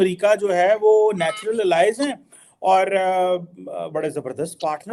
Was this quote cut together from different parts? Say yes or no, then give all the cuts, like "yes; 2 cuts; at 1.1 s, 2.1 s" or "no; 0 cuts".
no; 0 cuts